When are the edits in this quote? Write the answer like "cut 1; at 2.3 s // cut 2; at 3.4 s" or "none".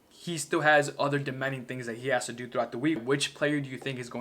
cut 1; at 3.0 s